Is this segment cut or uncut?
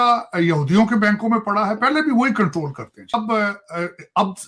cut